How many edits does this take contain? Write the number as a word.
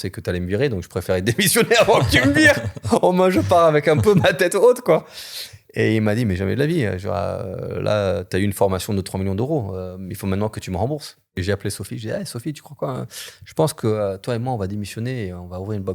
one